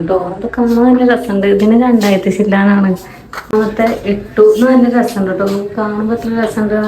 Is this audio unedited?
no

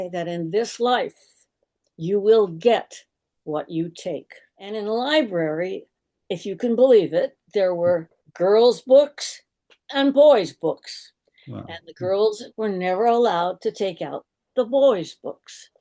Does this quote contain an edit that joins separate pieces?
yes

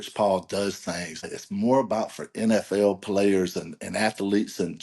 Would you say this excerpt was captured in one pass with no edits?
no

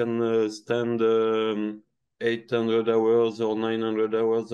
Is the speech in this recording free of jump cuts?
yes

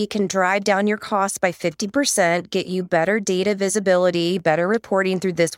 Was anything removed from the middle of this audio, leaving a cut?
no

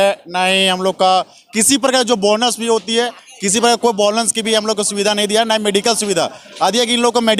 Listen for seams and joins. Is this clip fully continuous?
yes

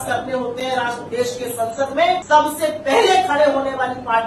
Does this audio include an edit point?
yes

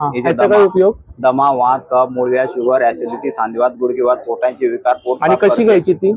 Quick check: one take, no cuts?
yes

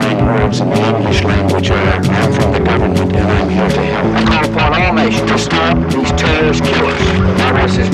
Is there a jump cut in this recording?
no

